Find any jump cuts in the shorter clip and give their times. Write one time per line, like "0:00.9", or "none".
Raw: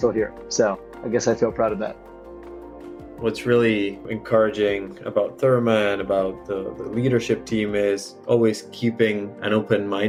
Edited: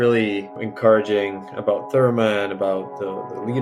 none